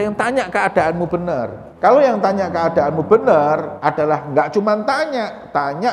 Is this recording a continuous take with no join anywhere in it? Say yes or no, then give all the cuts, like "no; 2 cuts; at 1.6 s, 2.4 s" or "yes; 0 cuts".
no; 2 cuts; at 1.6 s, 3.7 s